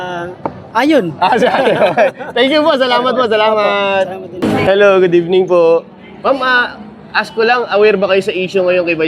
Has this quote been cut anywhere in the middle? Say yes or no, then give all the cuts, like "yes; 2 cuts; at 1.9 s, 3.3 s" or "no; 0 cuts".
no; 0 cuts